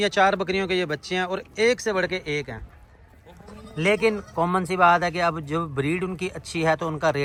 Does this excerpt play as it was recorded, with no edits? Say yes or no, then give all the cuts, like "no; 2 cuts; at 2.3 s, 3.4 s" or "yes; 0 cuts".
yes; 0 cuts